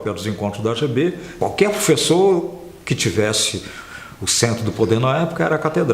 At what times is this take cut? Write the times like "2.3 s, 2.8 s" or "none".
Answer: 1.3 s